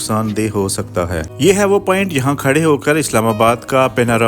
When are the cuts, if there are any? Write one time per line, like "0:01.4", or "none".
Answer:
0:01.3